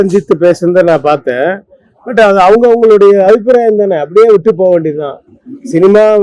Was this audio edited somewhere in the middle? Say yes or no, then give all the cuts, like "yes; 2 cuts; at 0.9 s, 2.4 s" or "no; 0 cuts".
no; 0 cuts